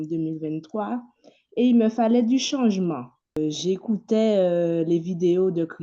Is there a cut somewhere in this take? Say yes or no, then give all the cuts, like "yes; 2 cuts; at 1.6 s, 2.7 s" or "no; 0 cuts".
yes; 1 cut; at 3.4 s